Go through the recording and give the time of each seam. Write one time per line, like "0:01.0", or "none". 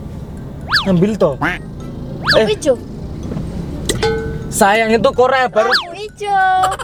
none